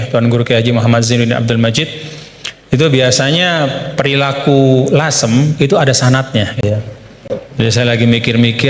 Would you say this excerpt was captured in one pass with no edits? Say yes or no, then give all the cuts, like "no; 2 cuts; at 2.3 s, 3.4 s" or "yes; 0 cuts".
no; 1 cut; at 6.6 s